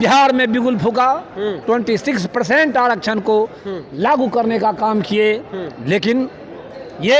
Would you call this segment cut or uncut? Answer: cut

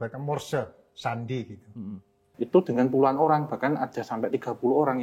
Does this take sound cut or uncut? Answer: cut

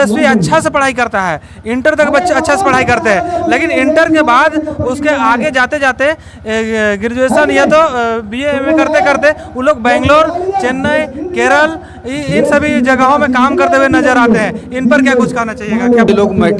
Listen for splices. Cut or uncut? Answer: uncut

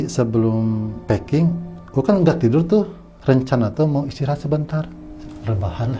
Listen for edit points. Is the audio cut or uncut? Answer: cut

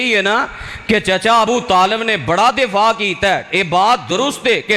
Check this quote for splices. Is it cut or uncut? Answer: uncut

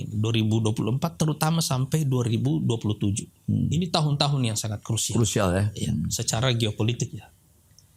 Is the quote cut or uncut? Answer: uncut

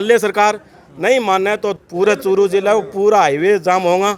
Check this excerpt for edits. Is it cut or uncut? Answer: cut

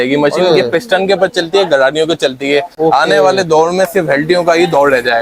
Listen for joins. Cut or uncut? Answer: uncut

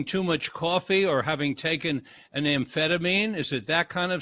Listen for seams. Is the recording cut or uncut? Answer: uncut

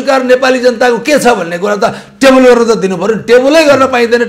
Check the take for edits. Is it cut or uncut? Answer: uncut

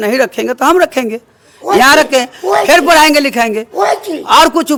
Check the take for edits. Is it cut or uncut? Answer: uncut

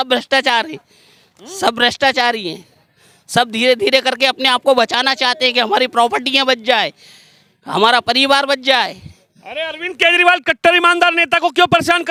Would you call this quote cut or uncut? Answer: uncut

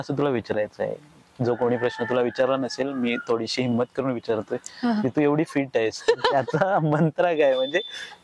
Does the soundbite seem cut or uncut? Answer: uncut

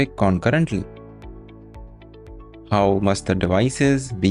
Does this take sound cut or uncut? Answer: uncut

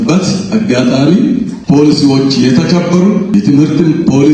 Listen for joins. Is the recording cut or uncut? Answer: cut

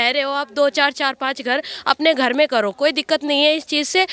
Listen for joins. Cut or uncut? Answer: uncut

